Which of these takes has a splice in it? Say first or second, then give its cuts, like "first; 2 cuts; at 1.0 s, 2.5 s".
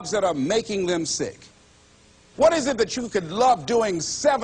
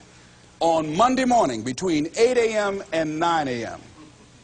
first; 1 cut; at 1.7 s